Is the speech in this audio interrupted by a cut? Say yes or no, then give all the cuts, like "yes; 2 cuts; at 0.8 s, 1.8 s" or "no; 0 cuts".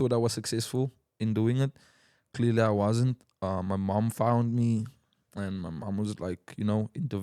no; 0 cuts